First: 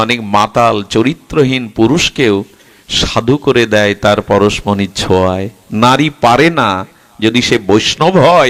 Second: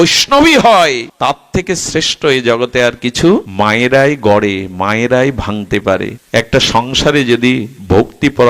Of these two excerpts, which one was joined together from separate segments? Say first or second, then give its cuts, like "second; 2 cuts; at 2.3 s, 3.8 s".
second; 3 cuts; at 1.1 s, 3.5 s, 6.2 s